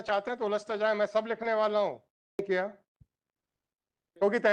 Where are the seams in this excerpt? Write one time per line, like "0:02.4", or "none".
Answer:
0:02.4